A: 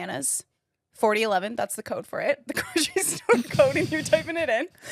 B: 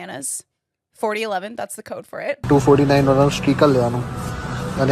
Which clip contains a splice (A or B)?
B